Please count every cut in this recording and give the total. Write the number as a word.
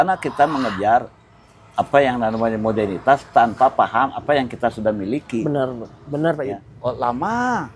one